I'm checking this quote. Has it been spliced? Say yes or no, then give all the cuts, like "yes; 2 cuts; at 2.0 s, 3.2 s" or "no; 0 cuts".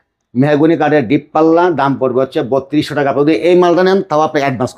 no; 0 cuts